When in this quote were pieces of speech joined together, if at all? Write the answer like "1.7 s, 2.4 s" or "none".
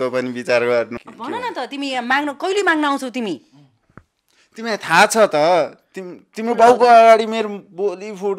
1.0 s

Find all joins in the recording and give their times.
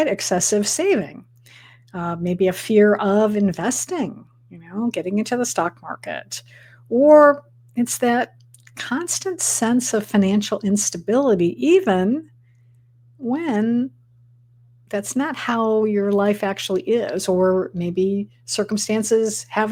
none

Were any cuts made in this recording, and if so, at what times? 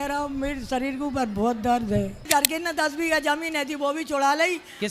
2.2 s

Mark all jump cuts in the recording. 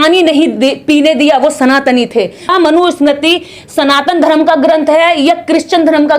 2.5 s

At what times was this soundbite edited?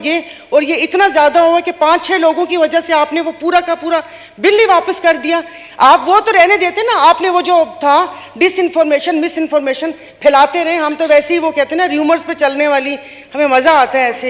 none

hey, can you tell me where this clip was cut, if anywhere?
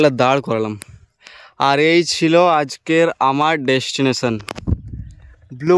none

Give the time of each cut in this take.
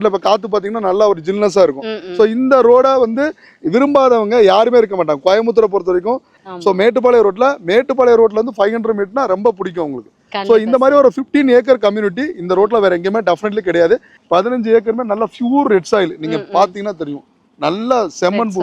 6.4 s, 14.1 s

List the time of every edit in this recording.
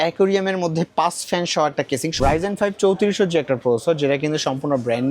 2.1 s

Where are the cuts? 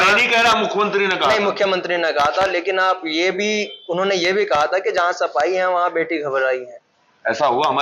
none

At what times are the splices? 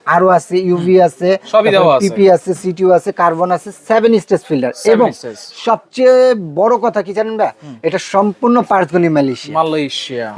none

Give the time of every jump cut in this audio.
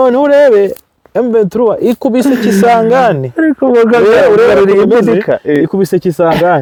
none

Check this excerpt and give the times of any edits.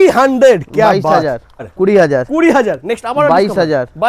1.6 s

